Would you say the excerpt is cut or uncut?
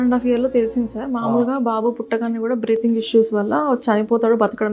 uncut